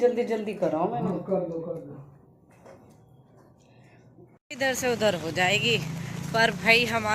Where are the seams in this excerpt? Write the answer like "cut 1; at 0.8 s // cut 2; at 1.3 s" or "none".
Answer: cut 1; at 4.3 s